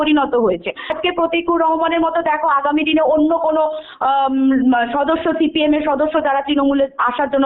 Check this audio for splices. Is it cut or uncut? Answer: cut